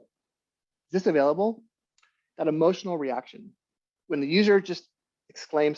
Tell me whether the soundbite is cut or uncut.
cut